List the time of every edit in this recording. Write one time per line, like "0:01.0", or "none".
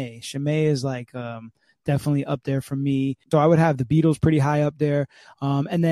0:03.2